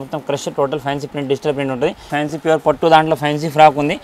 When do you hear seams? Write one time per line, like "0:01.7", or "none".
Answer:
0:02.1